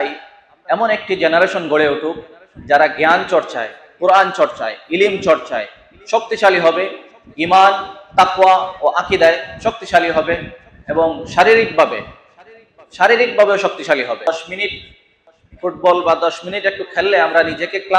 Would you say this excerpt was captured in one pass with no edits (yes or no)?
no